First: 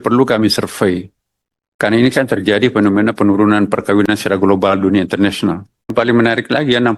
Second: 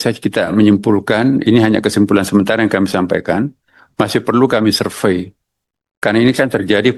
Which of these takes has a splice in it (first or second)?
first